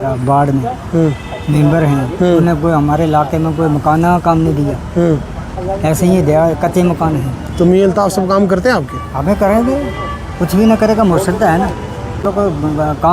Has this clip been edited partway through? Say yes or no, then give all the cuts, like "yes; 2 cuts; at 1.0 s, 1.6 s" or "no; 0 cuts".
yes; 1 cut; at 12.2 s